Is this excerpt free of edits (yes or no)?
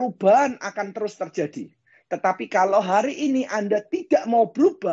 yes